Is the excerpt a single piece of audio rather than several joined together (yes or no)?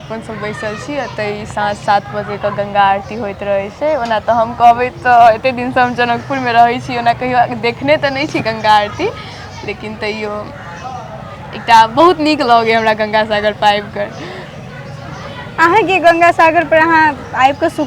yes